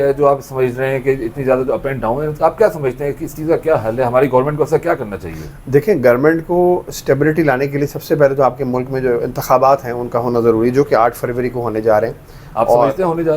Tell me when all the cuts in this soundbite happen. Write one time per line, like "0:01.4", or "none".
none